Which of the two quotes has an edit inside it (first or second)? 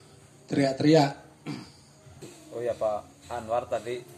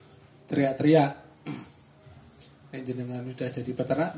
first